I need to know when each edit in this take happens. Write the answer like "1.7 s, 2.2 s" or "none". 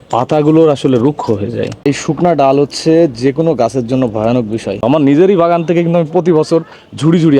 1.8 s, 4.8 s